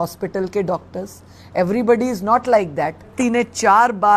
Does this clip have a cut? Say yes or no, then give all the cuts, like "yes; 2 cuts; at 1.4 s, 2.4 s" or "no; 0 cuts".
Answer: yes; 1 cut; at 3.1 s